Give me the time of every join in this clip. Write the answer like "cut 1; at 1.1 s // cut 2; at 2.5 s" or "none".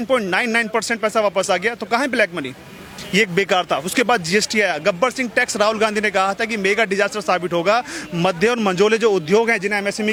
none